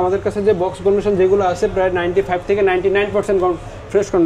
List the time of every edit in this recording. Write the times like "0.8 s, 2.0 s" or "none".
none